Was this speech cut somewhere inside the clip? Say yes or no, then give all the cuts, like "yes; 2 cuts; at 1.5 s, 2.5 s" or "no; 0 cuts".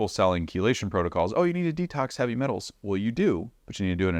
no; 0 cuts